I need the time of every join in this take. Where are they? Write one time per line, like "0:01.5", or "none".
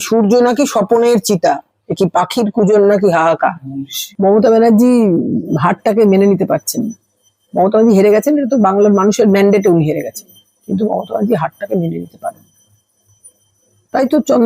none